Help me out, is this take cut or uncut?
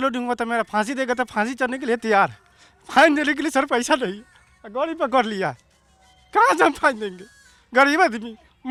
uncut